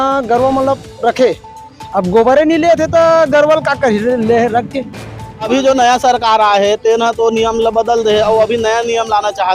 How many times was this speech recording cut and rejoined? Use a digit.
1